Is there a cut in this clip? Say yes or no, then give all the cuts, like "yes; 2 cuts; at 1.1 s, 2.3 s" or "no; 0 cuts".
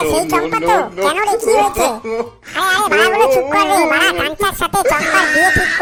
no; 0 cuts